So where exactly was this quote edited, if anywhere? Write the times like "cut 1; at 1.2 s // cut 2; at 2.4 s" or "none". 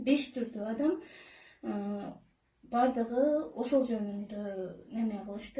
none